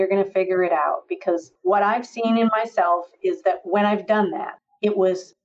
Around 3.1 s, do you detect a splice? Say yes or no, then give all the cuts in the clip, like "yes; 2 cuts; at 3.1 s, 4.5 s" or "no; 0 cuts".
no; 1 cut; at 1.5 s